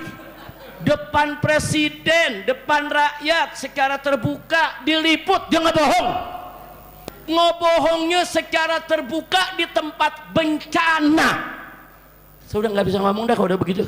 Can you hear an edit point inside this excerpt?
yes; 1 cut; at 6.9 s

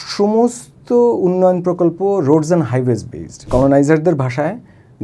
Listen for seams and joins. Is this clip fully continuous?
no; 1 cut; at 3.5 s

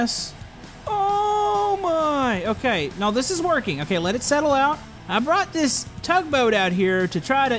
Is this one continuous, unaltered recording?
no; 1 cut; at 4.9 s

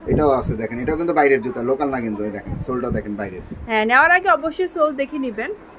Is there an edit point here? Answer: no; 0 cuts

